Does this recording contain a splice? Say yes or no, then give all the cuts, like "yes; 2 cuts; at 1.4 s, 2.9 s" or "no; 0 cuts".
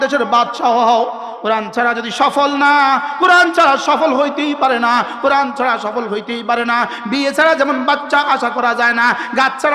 no; 0 cuts